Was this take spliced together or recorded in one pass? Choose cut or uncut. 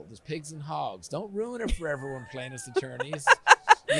uncut